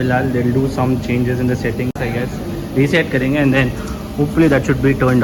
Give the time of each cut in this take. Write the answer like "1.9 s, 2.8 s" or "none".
none